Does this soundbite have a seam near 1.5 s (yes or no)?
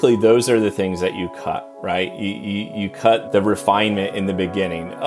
no